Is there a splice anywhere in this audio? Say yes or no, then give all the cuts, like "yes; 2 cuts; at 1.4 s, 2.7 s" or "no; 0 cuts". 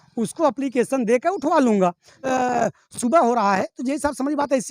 yes; 1 cut; at 2.2 s